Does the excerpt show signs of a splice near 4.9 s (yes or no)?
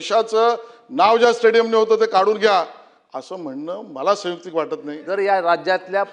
yes